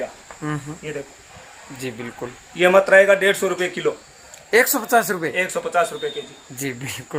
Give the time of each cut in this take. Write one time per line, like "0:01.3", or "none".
none